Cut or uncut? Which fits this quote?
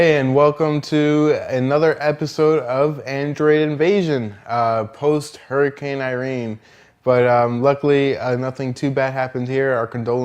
cut